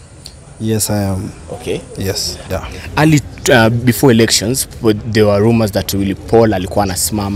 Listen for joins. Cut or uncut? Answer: cut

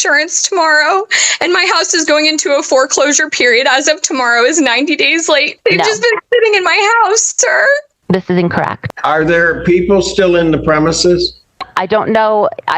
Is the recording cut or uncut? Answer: cut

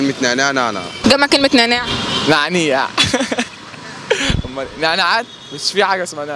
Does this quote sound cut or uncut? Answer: cut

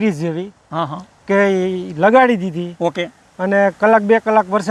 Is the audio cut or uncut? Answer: uncut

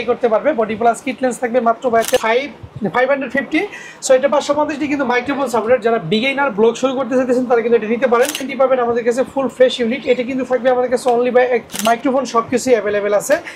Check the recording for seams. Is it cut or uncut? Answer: cut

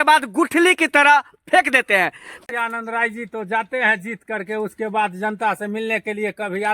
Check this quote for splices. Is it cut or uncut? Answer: cut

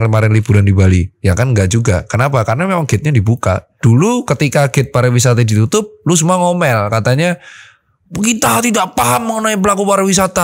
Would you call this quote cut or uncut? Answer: cut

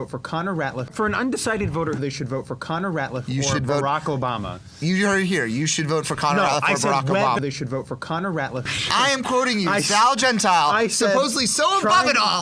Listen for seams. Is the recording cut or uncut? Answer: cut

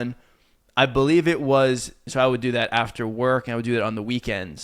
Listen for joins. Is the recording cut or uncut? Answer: cut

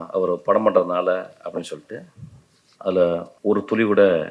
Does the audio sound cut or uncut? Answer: cut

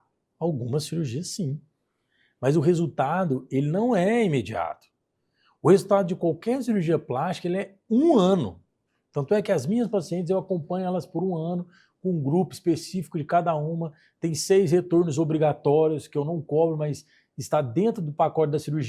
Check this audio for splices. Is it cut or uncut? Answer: uncut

